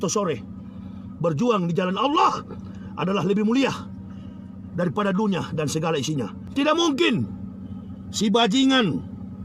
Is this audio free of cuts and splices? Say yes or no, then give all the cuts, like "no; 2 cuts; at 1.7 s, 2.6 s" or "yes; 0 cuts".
no; 1 cut; at 6.4 s